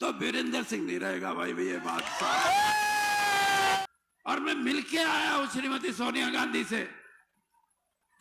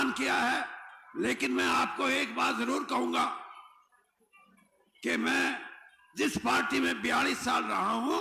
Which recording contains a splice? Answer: first; 1 cut; at 3.8 s

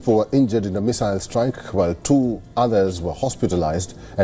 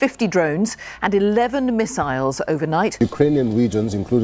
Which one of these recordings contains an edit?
second; 1 cut; at 2.9 s

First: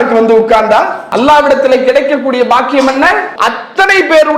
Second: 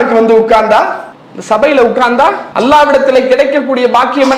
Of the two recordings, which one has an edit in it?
first; 2 cuts; at 1.0 s, 3.3 s

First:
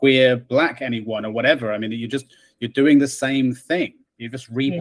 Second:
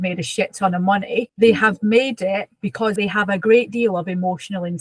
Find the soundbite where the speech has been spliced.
second; 2 cuts; at 1.3 s, 2.9 s

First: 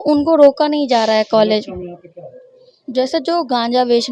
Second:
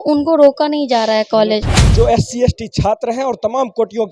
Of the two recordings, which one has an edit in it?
second; 1 cut; at 1.8 s

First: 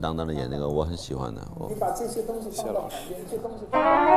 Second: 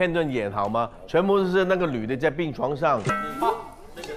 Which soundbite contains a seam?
second; 1 cut; at 3.1 s

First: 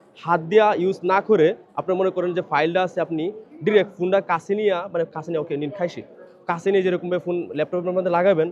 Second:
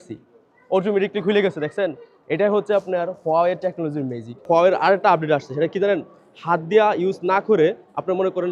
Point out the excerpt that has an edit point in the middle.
second; 1 cut; at 4.4 s

